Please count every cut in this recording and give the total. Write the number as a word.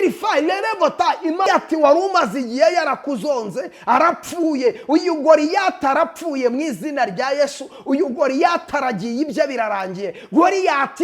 one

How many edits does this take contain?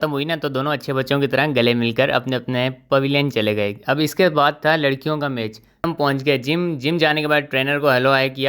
one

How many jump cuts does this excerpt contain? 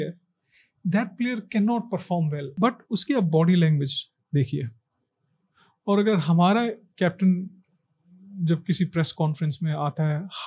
one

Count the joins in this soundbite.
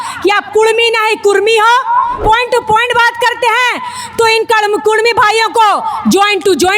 one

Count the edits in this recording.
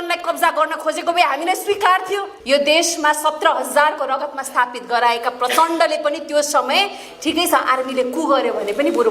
one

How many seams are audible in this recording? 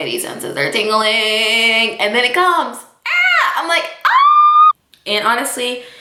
zero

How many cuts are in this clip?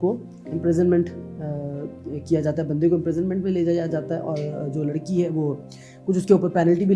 zero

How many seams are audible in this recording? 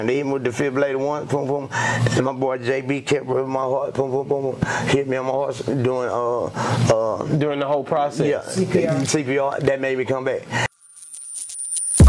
one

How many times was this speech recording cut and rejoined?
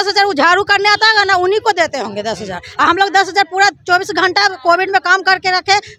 zero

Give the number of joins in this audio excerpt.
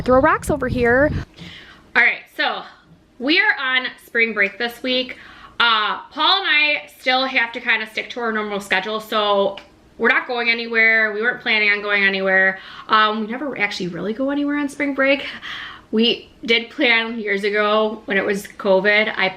one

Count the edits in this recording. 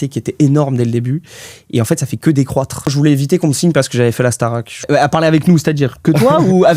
two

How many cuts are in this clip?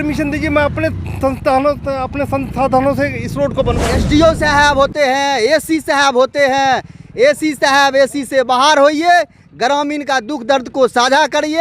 one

